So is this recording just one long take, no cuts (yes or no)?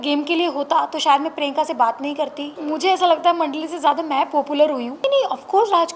no